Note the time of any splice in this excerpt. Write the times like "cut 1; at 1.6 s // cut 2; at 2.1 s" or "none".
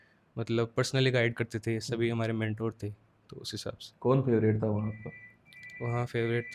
none